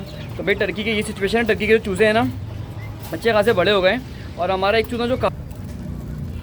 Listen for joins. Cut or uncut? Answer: cut